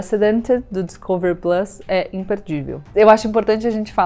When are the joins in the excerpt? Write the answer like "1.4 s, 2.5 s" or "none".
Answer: 2.9 s